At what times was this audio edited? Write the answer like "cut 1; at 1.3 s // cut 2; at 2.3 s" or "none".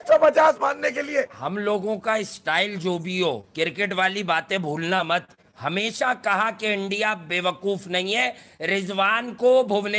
none